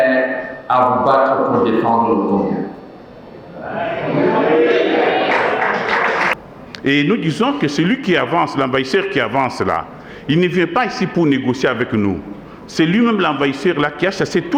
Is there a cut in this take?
yes; 1 cut; at 6.4 s

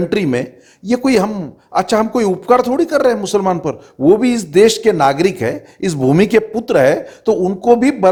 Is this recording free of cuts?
yes; 0 cuts

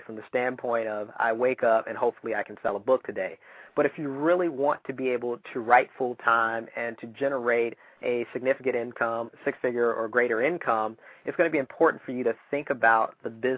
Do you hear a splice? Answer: no; 0 cuts

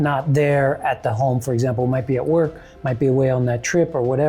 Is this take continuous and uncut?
yes; 0 cuts

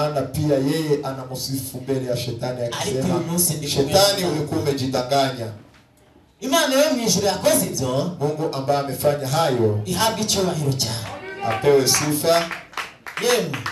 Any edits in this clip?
no; 0 cuts

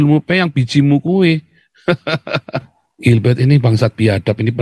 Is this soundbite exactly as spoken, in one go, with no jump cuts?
no; 1 cut; at 2.8 s

